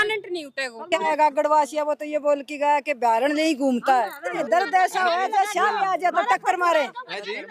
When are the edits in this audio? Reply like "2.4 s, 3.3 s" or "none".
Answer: 1.0 s, 4.3 s